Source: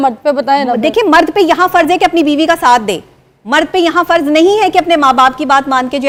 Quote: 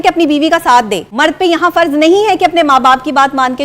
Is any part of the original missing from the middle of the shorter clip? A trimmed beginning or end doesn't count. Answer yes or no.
yes